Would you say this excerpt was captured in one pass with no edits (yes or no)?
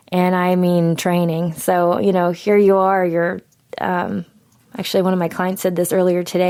yes